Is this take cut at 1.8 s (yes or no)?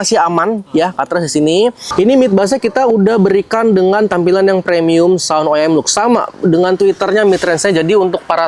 yes